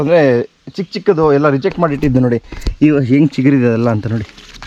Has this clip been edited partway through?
no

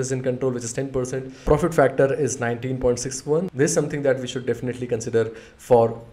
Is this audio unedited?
no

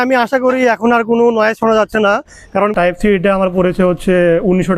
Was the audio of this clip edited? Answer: yes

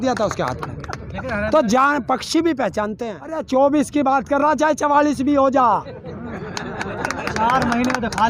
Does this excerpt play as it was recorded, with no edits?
no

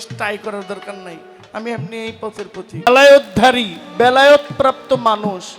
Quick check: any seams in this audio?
yes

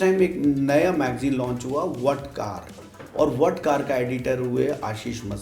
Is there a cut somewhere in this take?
no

